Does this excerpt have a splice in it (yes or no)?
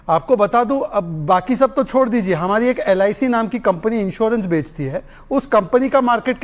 no